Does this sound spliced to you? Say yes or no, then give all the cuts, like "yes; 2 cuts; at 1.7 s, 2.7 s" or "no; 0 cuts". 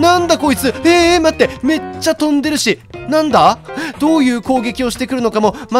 no; 0 cuts